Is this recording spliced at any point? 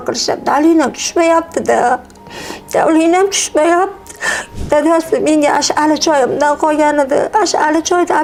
no; 0 cuts

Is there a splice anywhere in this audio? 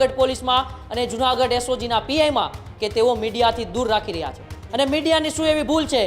no; 0 cuts

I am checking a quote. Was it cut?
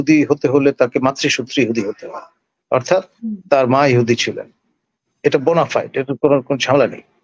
no; 0 cuts

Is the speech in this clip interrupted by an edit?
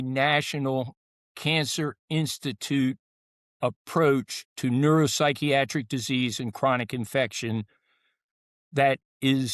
no; 0 cuts

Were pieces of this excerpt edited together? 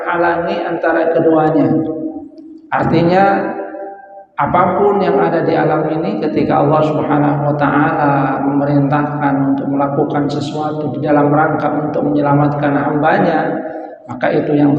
no; 0 cuts

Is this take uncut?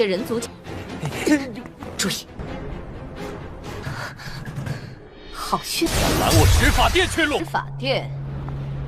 no; 1 cut; at 7.4 s

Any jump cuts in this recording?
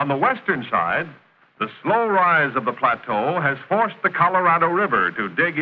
yes; 1 cut; at 2.6 s

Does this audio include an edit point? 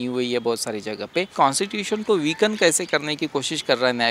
yes; 1 cut; at 1.3 s

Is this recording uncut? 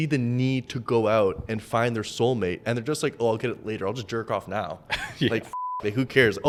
yes; 0 cuts

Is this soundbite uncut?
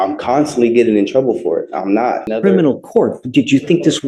no; 1 cut; at 2.3 s

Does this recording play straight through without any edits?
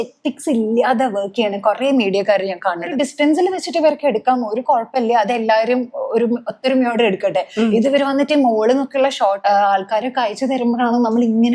no; 2 cuts; at 2.9 s, 9.4 s

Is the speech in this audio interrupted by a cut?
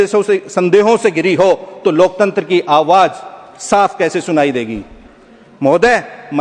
no; 0 cuts

